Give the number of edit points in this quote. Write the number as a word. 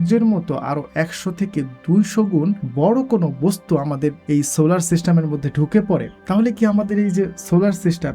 three